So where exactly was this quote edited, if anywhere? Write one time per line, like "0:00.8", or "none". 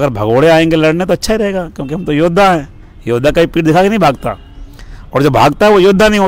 none

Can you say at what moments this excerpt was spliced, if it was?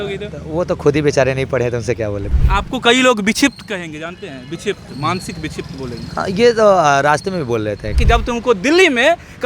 0:02.3
0:08.0

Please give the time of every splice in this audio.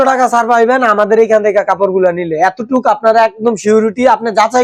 none

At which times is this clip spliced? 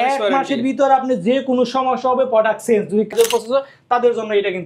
0:03.1

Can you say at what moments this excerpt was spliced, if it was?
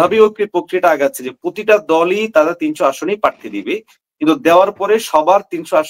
none

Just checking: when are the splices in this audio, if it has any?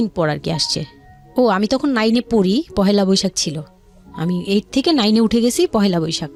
none

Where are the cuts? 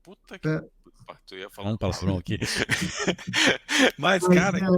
none

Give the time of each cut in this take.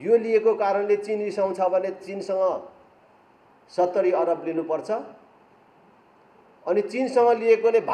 none

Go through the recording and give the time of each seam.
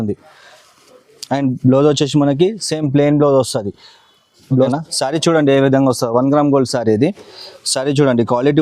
0:04.6

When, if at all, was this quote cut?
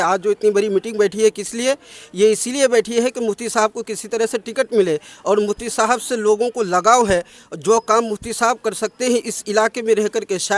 none

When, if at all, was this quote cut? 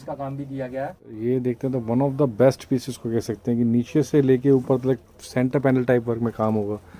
0:01.5

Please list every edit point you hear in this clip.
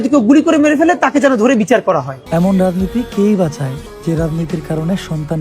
0:02.1
0:03.9

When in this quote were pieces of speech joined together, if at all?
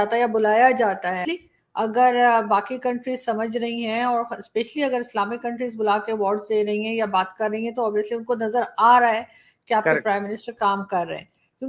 0:01.2

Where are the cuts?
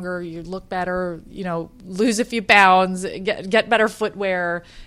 none

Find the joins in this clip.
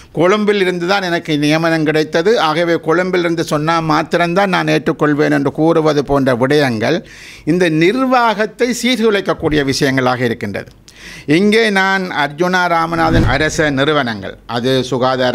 0:13.2

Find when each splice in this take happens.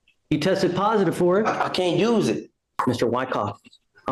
0:02.7

